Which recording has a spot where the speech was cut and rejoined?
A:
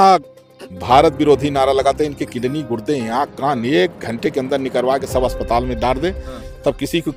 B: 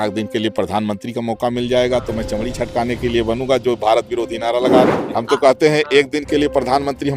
B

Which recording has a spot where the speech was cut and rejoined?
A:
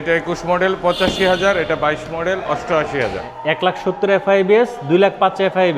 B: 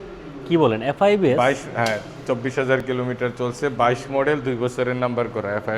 A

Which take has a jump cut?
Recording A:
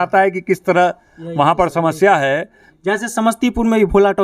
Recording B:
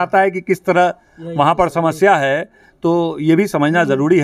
A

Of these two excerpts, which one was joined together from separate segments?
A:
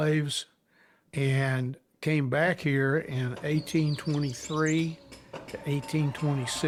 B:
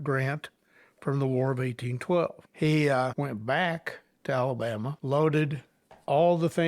B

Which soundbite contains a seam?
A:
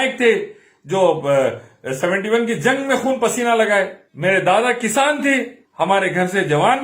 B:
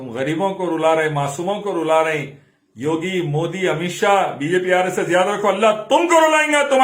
A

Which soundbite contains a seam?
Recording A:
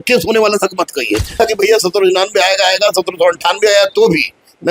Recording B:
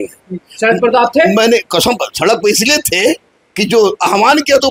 A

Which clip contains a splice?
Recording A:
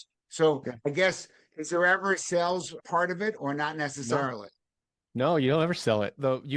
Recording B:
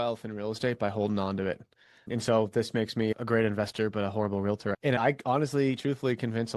B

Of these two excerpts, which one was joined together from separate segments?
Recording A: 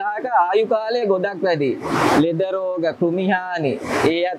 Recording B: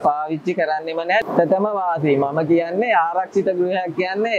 B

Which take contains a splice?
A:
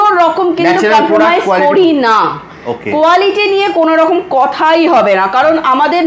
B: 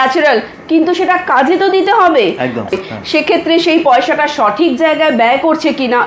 B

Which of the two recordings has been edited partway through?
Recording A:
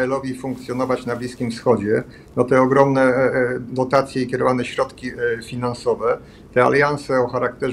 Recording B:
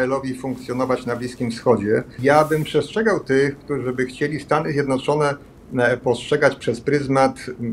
B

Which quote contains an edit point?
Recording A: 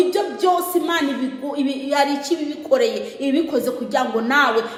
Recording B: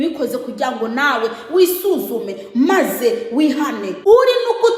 B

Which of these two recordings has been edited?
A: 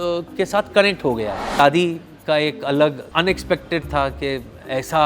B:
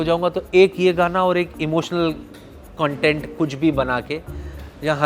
A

